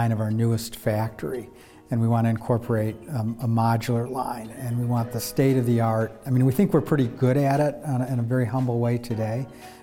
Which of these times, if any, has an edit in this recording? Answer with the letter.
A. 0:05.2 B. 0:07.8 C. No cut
A